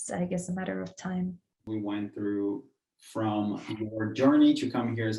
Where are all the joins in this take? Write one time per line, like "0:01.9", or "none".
0:01.6